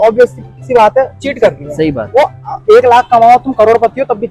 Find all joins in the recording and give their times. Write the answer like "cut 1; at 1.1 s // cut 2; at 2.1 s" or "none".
none